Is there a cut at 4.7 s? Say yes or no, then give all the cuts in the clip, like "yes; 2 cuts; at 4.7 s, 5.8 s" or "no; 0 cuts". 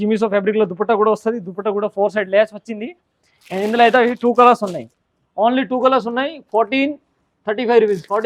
no; 0 cuts